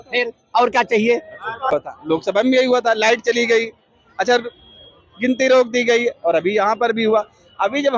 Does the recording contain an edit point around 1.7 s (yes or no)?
yes